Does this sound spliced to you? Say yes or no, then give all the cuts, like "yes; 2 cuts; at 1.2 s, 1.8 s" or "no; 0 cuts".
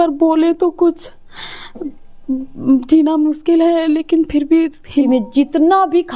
yes; 1 cut; at 5.0 s